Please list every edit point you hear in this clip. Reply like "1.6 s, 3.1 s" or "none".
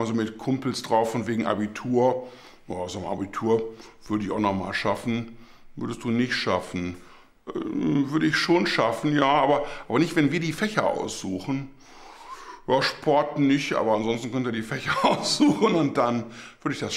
none